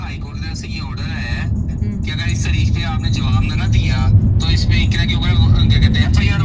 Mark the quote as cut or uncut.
uncut